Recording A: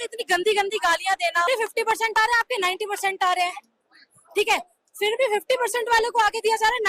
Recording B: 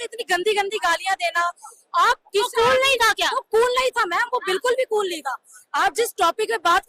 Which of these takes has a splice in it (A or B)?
A